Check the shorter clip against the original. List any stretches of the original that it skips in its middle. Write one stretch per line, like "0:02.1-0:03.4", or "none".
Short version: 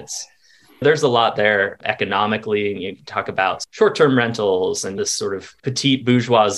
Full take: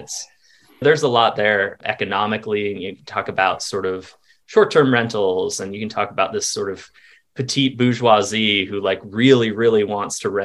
0:03.6-0:04.4
0:05.8-0:06.8